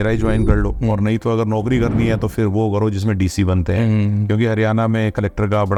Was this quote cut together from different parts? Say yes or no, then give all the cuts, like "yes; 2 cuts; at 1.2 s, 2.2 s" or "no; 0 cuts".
no; 0 cuts